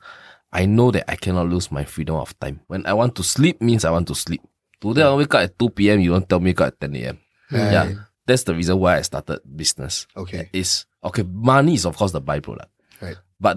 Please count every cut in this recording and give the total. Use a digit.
1